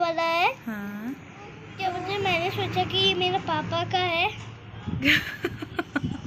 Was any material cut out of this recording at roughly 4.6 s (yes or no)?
no